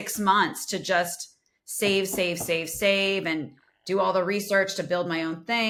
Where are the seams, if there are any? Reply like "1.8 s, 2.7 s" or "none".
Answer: none